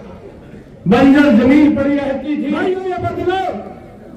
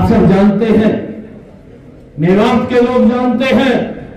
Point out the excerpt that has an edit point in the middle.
first; 1 cut; at 2.4 s

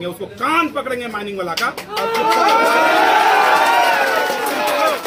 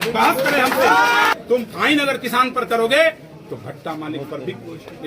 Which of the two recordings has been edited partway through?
second; 1 cut; at 1.3 s

